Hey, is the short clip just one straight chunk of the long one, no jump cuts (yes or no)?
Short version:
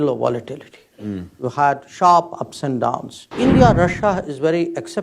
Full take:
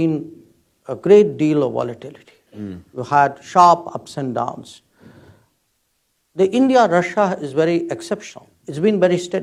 no